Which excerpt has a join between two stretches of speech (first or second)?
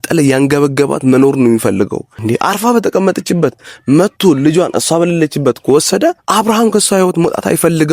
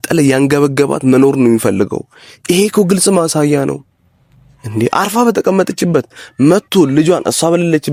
first